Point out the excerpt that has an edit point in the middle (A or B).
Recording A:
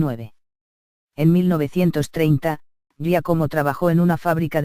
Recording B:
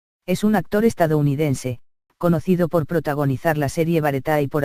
A